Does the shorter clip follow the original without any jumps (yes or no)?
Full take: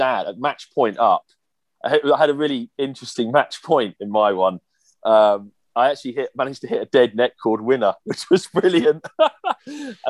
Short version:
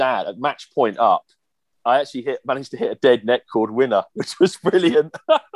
no